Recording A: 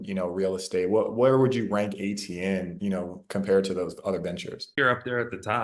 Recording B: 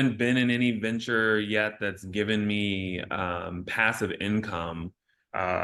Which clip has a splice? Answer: A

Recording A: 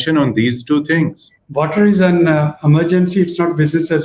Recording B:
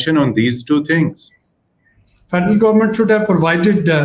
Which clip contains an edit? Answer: A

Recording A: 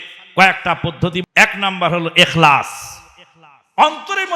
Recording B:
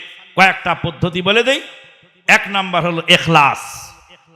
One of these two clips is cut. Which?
A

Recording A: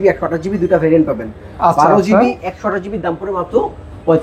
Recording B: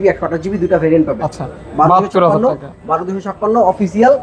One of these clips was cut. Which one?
B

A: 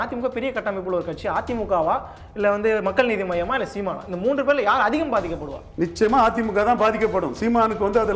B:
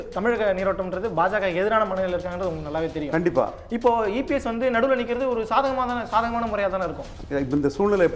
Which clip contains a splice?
B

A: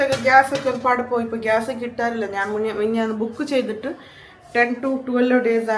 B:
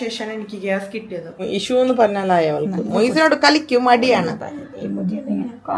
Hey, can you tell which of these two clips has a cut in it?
B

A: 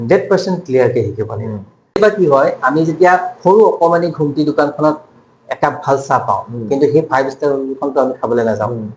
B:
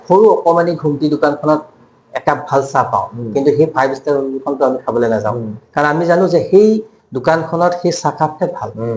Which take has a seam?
A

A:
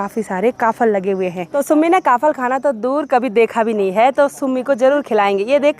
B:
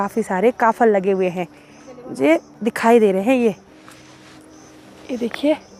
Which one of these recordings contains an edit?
A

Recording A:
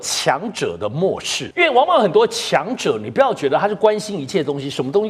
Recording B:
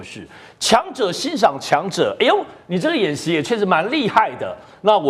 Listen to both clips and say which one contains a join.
A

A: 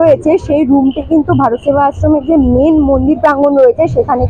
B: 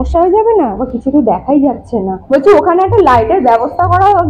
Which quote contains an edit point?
B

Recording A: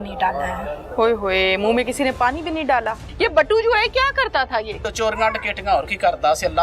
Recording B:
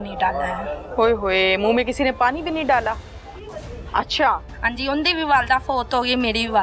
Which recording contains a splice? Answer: A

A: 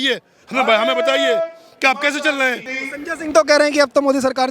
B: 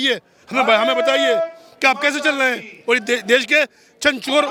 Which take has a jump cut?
A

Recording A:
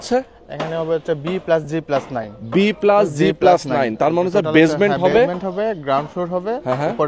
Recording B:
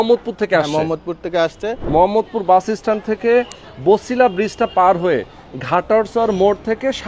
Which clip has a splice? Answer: B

